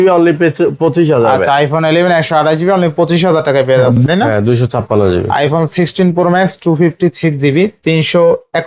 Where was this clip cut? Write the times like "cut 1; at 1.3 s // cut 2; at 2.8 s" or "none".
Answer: cut 1; at 4.0 s